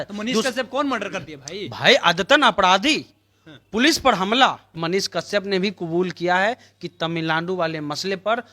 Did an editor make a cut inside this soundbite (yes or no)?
yes